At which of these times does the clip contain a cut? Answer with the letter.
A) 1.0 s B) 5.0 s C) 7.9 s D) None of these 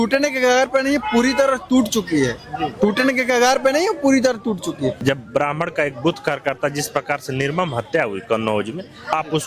B